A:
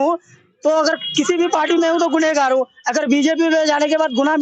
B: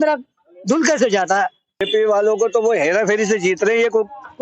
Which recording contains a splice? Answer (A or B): B